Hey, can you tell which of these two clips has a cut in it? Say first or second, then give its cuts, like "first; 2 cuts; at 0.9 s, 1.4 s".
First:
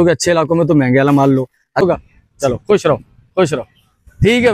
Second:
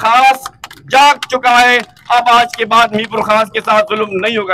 first; 1 cut; at 1.8 s